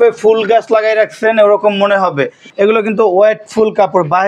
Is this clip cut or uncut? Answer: cut